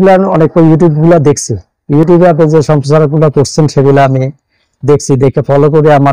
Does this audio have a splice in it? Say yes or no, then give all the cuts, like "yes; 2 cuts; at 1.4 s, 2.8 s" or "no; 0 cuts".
no; 0 cuts